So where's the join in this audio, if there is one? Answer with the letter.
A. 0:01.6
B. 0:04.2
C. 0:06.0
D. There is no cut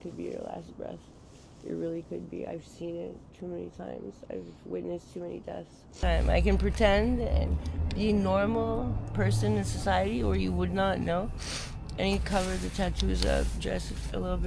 C